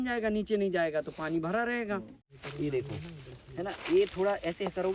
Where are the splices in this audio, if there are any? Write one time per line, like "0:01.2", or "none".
0:02.3